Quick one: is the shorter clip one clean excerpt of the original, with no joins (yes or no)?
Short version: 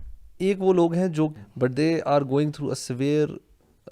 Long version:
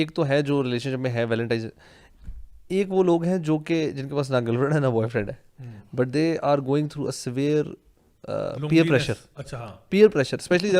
no